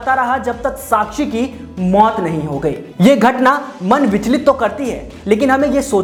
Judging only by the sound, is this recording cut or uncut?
uncut